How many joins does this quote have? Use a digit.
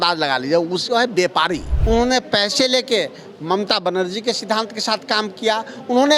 1